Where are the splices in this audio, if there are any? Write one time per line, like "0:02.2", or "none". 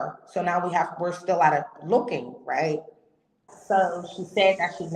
0:03.5